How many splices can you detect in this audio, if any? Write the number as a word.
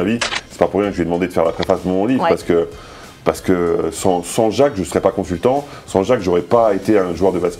zero